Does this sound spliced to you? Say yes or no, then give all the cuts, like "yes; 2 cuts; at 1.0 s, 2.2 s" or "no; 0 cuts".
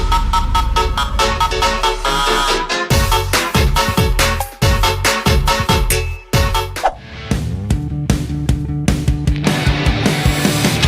yes; 1 cut; at 7.0 s